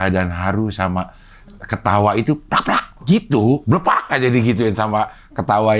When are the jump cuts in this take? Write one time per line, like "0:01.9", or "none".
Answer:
0:03.6